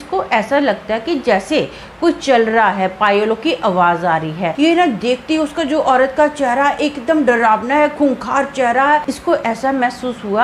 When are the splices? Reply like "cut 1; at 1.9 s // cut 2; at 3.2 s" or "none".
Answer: cut 1; at 4.5 s // cut 2; at 9.1 s